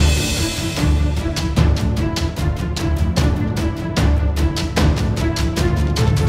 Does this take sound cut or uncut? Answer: uncut